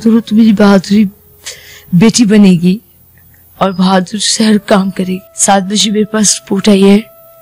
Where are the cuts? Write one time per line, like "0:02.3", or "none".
0:05.3